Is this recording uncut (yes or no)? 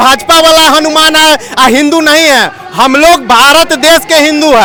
yes